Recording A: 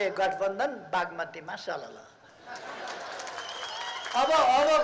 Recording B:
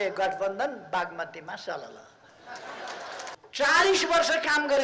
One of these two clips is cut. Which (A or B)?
B